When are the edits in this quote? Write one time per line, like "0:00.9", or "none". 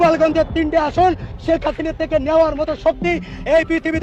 none